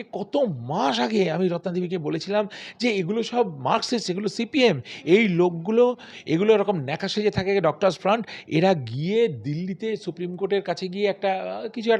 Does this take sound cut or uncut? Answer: uncut